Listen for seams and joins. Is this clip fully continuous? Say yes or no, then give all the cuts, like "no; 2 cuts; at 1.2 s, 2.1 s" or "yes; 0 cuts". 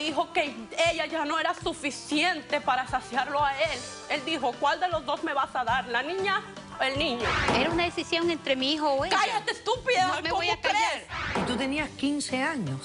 no; 3 cuts; at 3.9 s, 7.5 s, 11.3 s